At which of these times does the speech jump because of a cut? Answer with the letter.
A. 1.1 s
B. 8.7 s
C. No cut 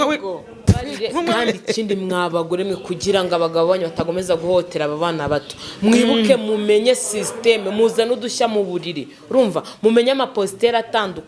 A